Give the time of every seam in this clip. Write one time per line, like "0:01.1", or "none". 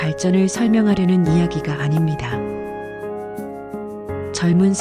0:02.2
0:04.0